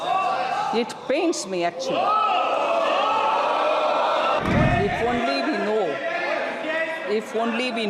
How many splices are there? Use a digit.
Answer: 1